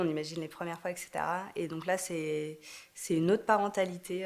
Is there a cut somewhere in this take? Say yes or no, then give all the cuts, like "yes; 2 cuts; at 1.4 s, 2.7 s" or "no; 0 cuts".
no; 0 cuts